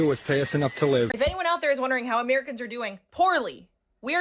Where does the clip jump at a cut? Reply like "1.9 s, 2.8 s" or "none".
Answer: 1.1 s